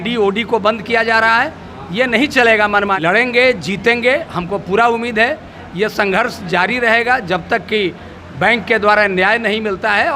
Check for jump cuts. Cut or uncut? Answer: cut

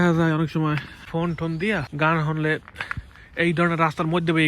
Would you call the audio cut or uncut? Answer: cut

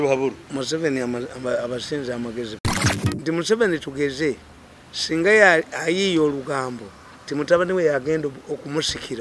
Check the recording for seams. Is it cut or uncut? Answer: cut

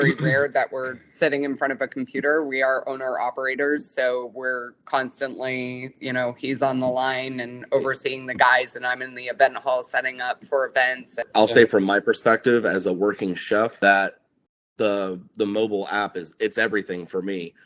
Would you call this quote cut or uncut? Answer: cut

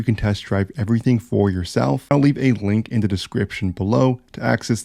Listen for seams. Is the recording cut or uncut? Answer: cut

